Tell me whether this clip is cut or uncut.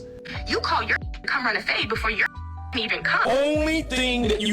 cut